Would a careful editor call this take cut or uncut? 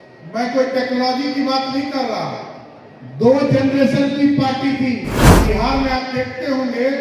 cut